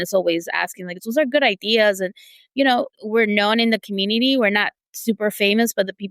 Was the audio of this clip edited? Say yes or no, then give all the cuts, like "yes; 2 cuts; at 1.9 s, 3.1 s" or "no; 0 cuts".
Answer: yes; 2 cuts; at 1.0 s, 3.0 s